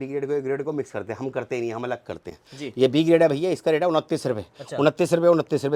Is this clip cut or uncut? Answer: uncut